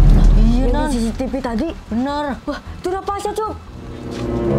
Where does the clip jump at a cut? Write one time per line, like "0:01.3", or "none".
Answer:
0:02.4